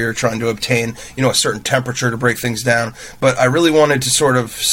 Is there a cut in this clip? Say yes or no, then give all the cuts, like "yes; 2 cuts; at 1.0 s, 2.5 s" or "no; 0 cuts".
no; 0 cuts